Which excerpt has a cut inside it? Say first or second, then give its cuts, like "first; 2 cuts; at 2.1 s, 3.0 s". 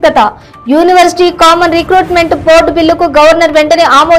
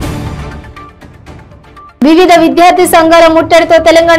second; 1 cut; at 1.9 s